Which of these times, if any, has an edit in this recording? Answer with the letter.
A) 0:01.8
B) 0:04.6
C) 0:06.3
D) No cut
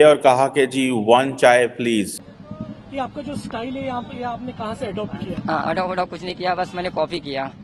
A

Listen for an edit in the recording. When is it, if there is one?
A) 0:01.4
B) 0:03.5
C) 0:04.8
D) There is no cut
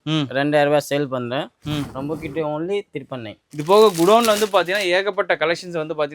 B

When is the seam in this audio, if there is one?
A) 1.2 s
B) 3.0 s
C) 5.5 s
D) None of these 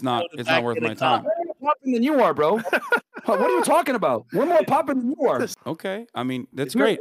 C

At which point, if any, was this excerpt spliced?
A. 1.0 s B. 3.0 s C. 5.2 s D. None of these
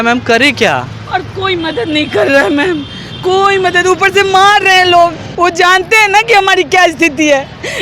C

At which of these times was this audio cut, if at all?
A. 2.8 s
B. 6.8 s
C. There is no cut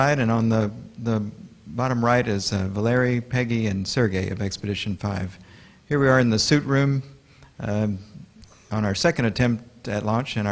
B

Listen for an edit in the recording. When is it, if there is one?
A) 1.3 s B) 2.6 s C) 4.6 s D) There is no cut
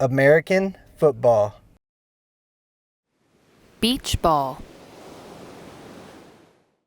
C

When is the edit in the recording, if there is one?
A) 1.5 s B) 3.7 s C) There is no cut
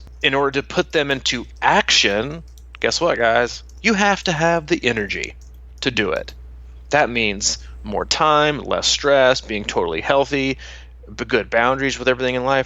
B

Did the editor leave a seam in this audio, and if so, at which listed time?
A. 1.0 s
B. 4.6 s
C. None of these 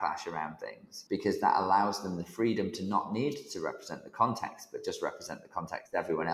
A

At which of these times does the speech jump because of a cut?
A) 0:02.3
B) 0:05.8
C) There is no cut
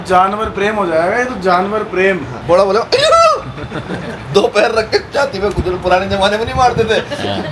A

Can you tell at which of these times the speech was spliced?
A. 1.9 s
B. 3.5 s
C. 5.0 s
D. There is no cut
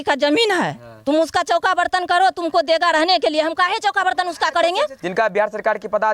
C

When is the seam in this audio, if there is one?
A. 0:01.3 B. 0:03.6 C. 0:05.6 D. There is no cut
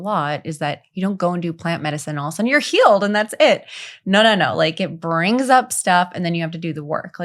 D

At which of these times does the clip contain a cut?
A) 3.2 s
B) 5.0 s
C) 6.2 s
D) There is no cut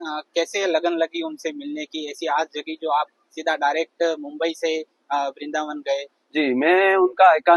D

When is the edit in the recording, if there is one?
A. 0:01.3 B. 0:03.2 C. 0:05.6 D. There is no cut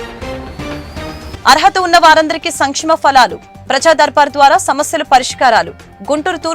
A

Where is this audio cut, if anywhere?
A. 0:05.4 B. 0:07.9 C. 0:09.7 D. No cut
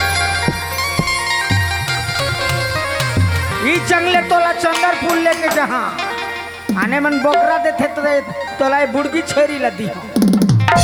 D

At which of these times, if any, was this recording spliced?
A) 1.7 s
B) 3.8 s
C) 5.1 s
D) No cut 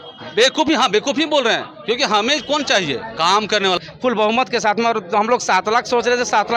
B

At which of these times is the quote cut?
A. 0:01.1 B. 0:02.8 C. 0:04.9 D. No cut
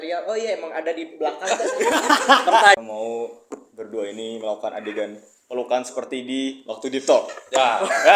B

